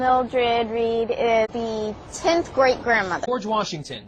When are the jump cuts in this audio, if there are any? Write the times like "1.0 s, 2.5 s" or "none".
1.5 s, 3.2 s